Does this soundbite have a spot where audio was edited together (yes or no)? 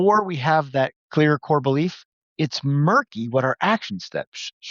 yes